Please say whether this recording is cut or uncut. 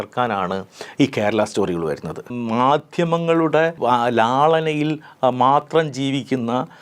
cut